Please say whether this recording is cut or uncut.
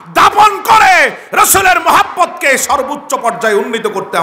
uncut